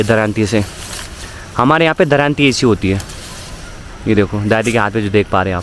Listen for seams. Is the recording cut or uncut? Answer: uncut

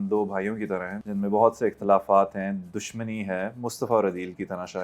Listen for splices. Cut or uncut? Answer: cut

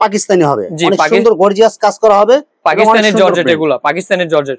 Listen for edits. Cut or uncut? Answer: uncut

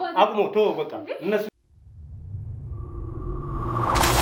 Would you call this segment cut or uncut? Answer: uncut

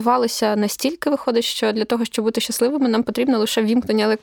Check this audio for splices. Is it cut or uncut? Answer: uncut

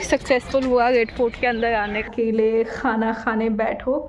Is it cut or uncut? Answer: cut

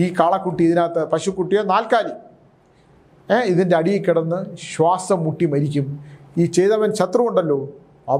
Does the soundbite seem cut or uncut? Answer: uncut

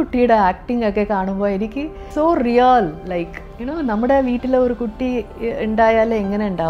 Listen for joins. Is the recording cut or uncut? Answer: cut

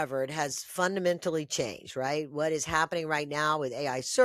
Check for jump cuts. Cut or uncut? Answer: uncut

